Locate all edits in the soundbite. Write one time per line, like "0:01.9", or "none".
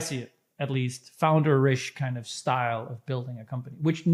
none